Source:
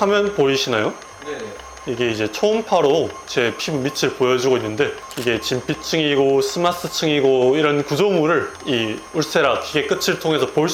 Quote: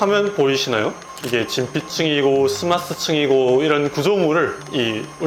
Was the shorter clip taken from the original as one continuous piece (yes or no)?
no